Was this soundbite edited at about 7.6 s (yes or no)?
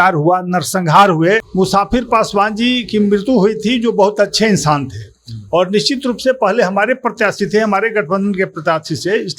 no